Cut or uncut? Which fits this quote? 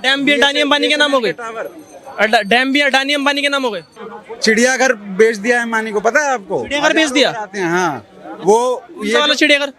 cut